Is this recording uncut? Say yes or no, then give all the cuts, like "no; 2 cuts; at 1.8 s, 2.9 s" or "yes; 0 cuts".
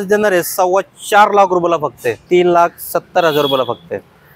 no; 1 cut; at 2.2 s